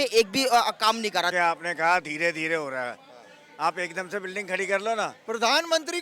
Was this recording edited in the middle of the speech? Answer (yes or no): yes